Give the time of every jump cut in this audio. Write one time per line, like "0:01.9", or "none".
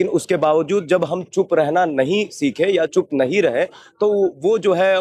none